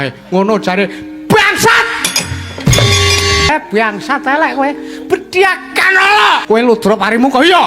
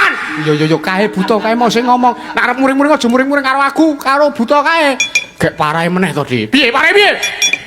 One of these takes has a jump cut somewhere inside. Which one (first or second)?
first